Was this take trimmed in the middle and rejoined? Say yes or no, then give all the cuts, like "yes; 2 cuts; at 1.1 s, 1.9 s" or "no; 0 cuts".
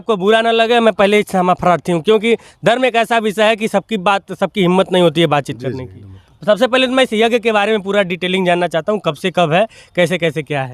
no; 0 cuts